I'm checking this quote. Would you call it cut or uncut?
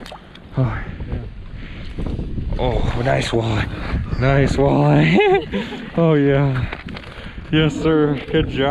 cut